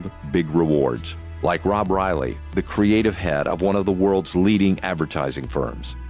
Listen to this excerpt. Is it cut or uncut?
uncut